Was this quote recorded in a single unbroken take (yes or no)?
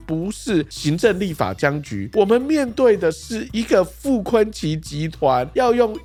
yes